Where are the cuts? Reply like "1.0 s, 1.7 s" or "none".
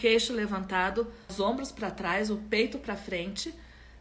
1.3 s